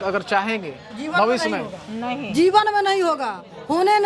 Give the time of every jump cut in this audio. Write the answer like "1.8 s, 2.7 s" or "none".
none